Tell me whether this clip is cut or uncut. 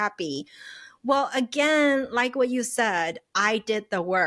uncut